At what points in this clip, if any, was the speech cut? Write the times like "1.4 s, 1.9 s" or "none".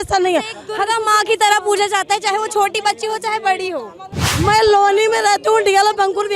4.2 s